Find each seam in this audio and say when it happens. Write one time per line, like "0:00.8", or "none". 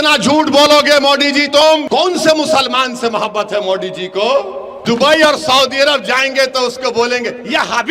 0:01.8
0:04.7